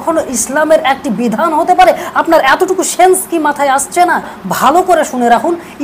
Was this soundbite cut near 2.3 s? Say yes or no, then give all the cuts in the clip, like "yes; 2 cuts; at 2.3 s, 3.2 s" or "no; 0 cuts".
no; 1 cut; at 4.4 s